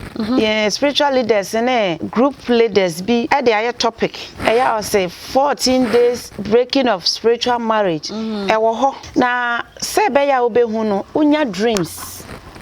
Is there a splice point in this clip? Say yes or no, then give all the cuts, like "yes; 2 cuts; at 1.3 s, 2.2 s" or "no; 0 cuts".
yes; 5 cuts; at 2.0 s, 3.3 s, 4.3 s, 6.3 s, 9.0 s